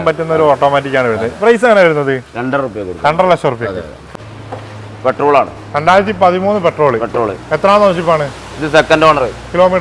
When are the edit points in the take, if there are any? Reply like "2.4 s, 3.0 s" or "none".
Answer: 4.1 s